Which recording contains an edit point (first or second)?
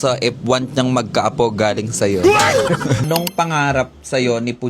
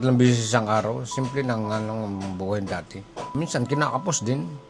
first